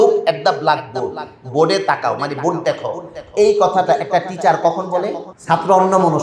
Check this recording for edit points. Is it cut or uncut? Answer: cut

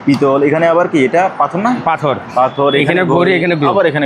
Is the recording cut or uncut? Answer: uncut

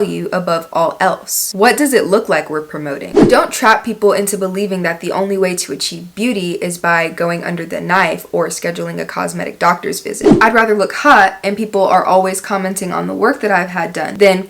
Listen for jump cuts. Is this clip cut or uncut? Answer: cut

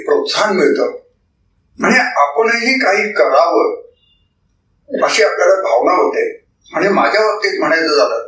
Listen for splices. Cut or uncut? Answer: cut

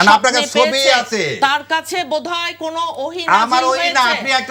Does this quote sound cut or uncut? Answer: uncut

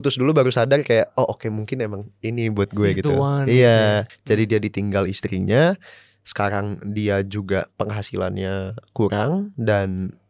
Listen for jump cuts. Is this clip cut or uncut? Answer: cut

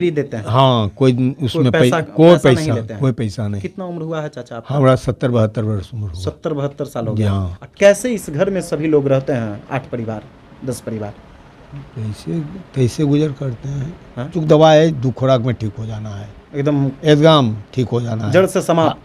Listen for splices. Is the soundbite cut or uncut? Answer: cut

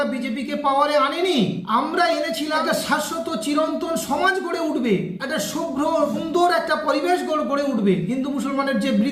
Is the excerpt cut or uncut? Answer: uncut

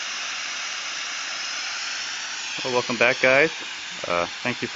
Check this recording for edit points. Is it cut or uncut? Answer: uncut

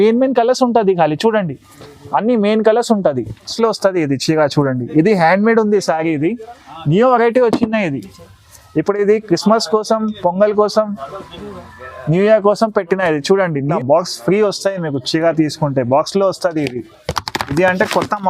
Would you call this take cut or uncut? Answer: cut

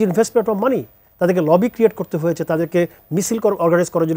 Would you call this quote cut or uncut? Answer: uncut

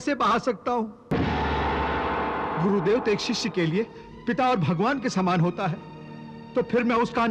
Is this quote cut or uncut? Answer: cut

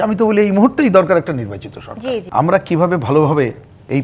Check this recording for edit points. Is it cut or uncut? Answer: cut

